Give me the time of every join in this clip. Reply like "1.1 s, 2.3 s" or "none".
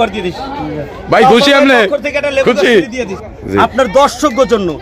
3.1 s